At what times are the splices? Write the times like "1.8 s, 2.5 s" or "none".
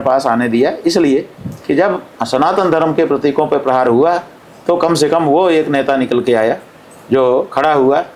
none